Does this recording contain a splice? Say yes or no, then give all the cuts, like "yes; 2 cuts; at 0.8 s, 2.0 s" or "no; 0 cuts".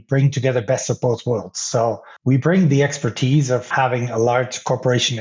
yes; 2 cuts; at 2.1 s, 3.7 s